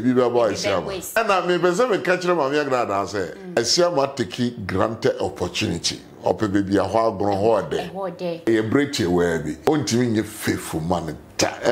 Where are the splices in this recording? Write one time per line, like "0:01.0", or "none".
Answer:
0:01.2
0:03.6
0:08.5
0:09.5